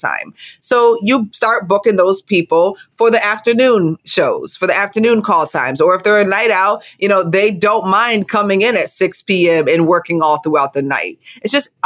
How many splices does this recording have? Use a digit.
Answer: 2